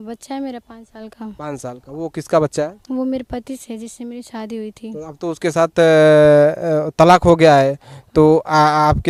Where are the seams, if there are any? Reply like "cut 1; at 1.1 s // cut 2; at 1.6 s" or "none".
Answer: none